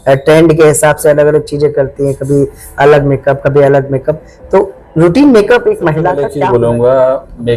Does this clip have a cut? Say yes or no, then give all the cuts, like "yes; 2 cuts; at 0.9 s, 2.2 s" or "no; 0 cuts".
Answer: yes; 1 cut; at 6.3 s